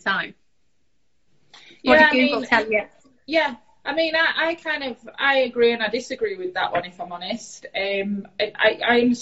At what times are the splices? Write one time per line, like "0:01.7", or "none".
none